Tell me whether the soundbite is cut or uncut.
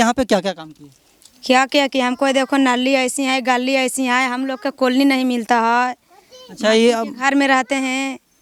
uncut